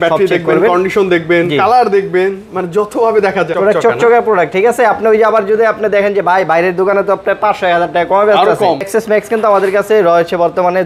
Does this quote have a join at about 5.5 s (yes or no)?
no